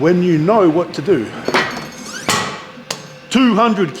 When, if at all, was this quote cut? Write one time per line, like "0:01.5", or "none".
0:01.9